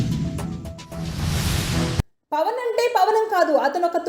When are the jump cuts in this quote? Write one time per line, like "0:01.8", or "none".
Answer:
0:02.1

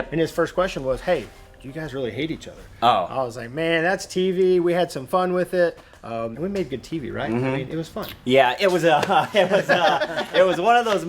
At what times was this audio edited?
0:06.3

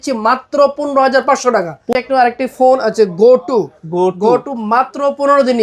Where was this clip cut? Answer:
0:01.8

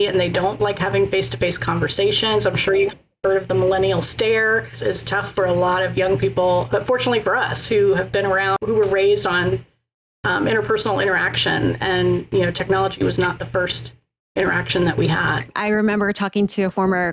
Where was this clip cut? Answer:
0:04.8
0:06.7
0:08.5
0:15.5

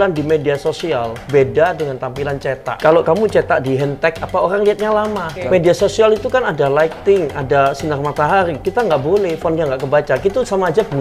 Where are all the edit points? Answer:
0:02.7
0:05.3

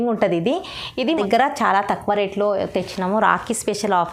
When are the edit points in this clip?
0:01.1

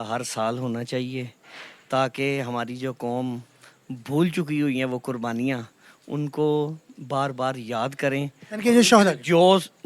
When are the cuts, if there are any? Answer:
none

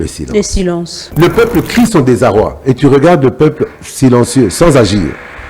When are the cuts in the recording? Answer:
0:01.0

